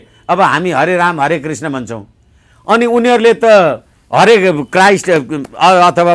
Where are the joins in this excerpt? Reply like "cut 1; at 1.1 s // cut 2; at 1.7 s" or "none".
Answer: none